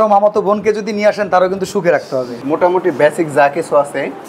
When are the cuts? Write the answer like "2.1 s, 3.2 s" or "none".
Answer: 2.4 s

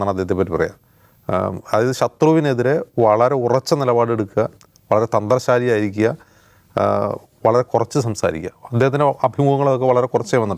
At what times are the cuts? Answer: none

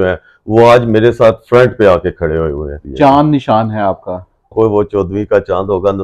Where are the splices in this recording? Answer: 2.8 s, 4.5 s

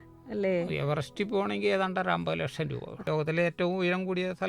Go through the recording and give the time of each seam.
2.9 s

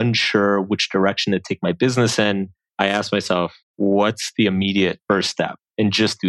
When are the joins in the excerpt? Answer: 2.6 s, 3.6 s, 5.0 s

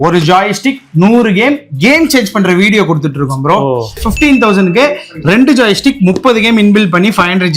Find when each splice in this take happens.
4.0 s

